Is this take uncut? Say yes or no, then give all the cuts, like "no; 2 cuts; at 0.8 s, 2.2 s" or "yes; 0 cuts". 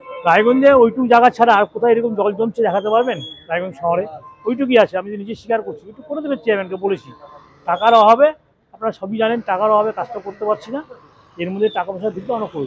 yes; 0 cuts